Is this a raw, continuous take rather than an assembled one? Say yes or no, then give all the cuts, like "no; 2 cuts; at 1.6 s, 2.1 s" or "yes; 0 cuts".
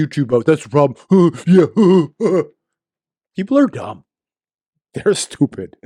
yes; 0 cuts